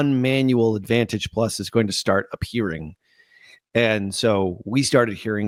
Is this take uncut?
yes; 0 cuts

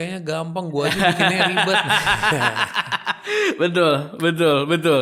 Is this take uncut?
yes; 0 cuts

